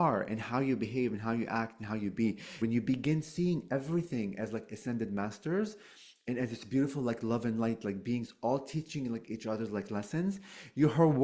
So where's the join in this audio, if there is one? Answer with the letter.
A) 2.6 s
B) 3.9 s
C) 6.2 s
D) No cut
A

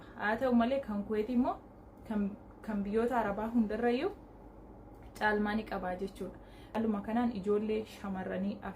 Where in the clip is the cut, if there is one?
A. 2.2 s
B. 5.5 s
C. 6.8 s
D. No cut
C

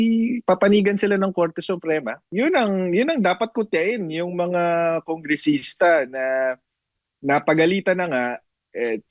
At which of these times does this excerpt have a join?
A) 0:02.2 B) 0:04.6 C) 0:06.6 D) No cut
A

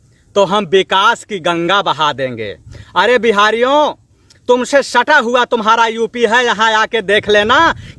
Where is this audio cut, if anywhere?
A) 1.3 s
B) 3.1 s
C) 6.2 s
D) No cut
D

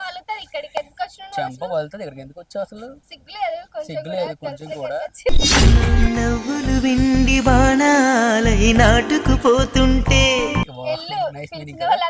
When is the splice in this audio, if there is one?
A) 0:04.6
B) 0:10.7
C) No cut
B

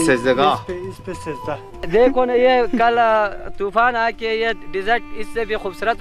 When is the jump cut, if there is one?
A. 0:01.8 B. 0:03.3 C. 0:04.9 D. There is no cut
A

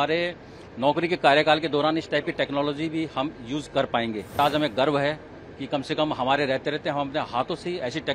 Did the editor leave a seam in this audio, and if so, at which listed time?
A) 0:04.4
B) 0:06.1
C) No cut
A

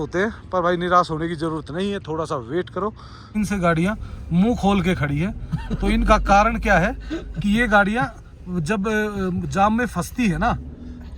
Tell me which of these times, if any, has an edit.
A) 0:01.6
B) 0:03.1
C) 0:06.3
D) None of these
B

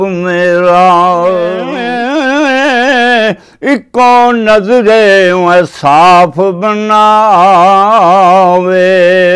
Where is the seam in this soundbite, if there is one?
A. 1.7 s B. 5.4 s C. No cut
A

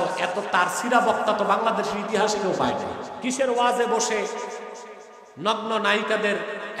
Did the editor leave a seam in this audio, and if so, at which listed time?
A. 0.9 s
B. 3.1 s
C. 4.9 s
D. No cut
B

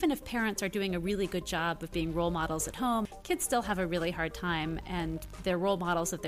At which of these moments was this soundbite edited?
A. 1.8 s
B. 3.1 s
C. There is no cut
B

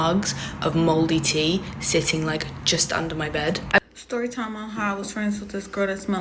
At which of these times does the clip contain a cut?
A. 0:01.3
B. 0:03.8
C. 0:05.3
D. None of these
B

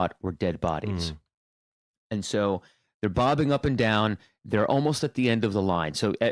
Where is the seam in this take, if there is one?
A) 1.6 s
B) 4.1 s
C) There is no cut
C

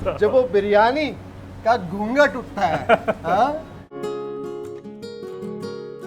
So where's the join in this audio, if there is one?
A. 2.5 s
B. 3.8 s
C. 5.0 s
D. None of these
B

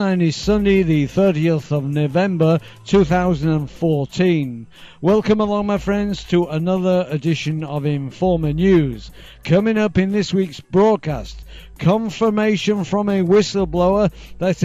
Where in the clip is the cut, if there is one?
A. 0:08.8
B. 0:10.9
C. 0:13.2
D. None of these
B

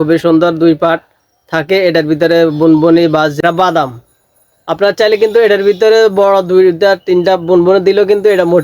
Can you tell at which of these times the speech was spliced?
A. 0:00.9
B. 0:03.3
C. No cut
B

